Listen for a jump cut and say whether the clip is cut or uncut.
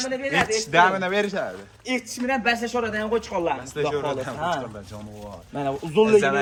uncut